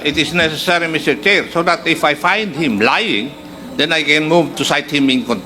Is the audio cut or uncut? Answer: uncut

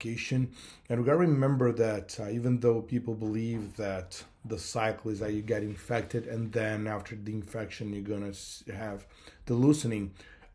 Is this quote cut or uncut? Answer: uncut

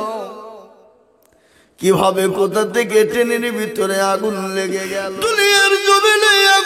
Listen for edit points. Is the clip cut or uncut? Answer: cut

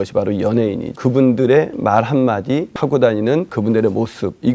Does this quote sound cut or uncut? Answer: cut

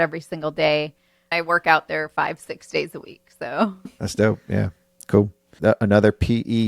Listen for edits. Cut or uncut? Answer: cut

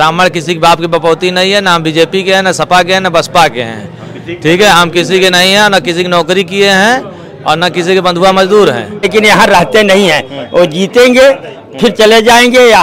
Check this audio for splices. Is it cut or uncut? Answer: cut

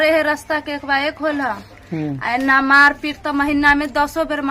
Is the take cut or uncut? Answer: uncut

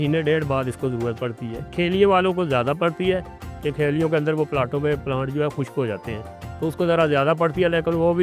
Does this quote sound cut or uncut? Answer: uncut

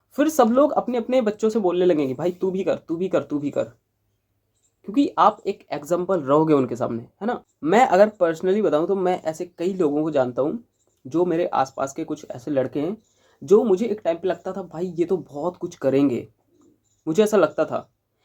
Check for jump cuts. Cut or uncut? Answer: cut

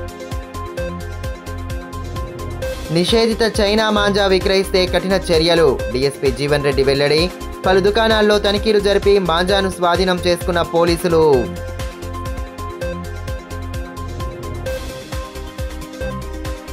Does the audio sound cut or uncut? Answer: uncut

